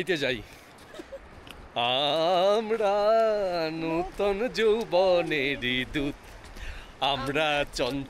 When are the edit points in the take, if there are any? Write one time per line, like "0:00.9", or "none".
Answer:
none